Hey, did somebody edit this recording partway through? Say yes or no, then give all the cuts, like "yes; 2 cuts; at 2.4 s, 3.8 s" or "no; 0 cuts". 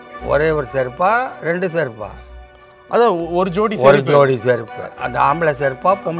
yes; 1 cut; at 4.9 s